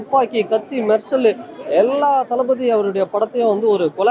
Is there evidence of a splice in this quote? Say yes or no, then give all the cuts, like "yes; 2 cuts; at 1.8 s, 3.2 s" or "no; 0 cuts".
no; 0 cuts